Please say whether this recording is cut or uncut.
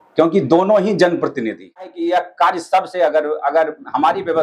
cut